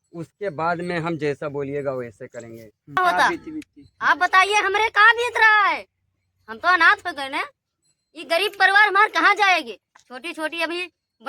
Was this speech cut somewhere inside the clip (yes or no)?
yes